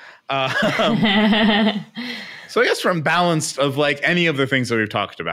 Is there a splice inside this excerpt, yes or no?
no